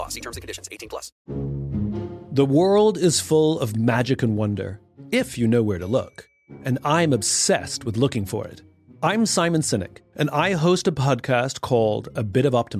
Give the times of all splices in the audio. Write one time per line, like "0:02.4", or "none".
0:01.1